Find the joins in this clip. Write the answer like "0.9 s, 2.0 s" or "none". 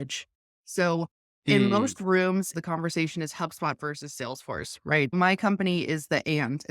2.5 s, 5.1 s

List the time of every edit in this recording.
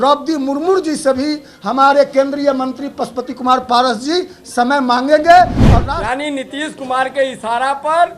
5.7 s

